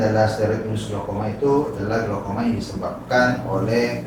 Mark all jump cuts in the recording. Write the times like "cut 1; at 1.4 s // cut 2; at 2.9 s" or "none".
none